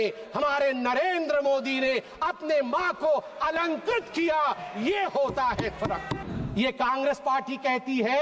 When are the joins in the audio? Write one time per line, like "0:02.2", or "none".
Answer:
0:06.2